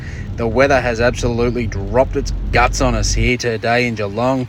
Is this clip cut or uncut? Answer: uncut